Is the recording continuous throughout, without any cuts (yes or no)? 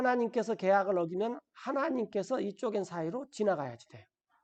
yes